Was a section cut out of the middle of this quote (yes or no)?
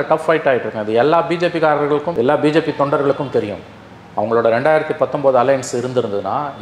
no